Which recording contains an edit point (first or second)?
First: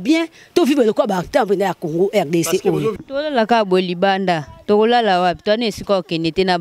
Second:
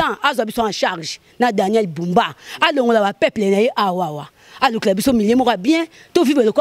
first